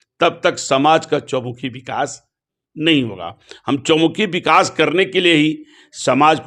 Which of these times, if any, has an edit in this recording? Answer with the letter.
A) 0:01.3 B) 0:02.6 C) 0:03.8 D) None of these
D